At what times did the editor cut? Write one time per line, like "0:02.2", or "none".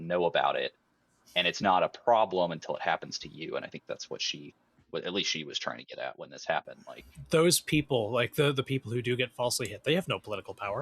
0:06.8